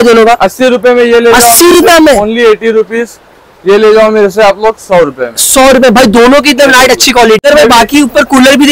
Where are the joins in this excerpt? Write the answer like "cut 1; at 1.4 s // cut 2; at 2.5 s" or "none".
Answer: cut 1; at 7.4 s